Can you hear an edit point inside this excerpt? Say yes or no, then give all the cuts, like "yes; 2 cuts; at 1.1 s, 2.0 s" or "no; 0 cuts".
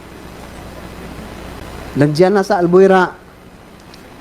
yes; 1 cut; at 1.6 s